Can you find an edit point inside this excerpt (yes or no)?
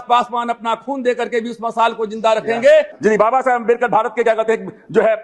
yes